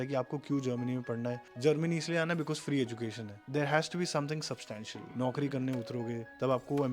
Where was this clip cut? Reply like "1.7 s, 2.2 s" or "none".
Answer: 1.5 s, 3.4 s, 5.0 s